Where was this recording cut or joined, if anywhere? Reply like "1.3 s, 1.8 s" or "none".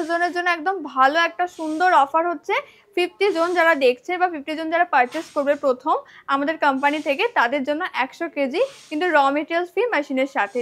none